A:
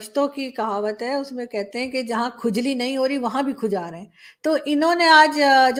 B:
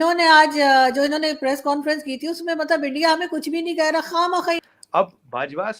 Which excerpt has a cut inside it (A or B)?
B